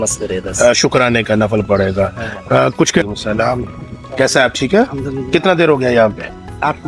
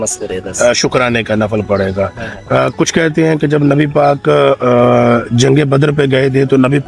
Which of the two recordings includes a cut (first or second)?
first